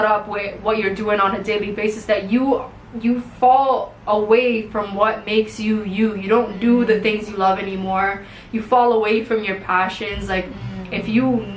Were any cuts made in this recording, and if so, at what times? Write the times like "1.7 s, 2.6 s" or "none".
none